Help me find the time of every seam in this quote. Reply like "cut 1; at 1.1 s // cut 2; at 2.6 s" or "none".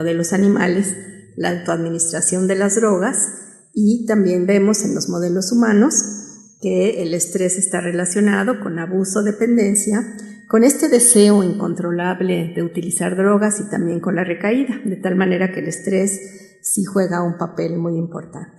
none